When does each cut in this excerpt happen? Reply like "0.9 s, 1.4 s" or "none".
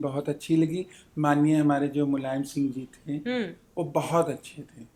none